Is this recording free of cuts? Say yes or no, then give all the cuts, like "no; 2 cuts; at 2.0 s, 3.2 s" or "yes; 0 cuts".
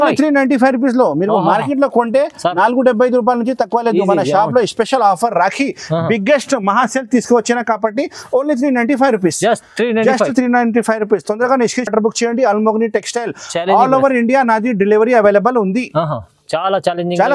yes; 0 cuts